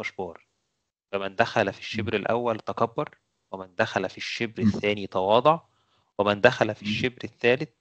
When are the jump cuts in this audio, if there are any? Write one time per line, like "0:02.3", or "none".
none